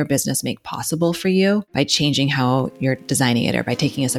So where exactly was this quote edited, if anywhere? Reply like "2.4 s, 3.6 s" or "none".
1.7 s, 3.0 s